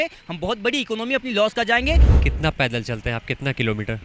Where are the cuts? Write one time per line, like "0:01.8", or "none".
0:02.1